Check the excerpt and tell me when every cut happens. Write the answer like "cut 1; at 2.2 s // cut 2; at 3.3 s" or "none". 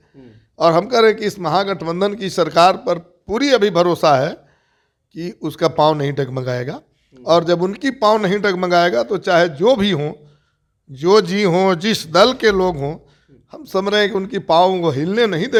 none

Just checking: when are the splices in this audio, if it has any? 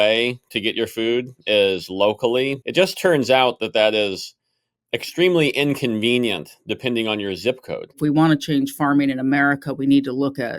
cut 1; at 2.6 s // cut 2; at 8.0 s

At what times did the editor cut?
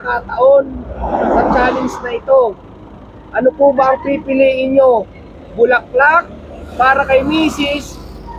none

